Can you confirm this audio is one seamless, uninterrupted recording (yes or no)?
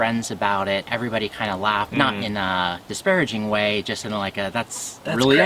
no